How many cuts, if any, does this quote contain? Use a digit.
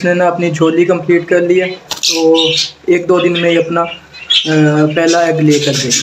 0